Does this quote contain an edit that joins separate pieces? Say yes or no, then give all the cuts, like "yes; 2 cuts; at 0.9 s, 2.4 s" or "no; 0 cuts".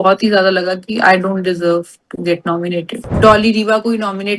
yes; 1 cut; at 3.1 s